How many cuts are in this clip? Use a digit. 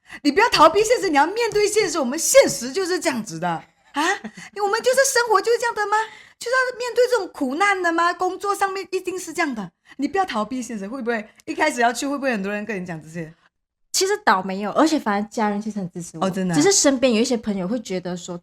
0